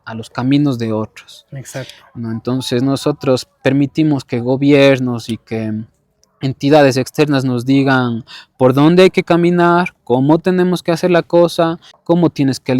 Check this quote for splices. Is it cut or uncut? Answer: cut